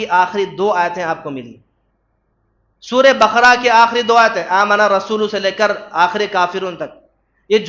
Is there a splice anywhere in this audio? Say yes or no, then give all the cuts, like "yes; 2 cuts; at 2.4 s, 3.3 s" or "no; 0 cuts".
no; 0 cuts